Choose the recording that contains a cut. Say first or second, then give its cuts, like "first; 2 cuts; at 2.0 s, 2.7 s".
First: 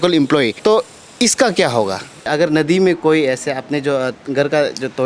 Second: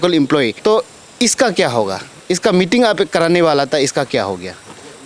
first; 1 cut; at 2.3 s